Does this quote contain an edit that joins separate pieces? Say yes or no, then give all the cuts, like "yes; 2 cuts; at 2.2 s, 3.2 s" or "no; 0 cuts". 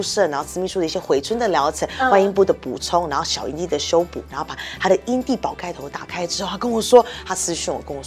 no; 0 cuts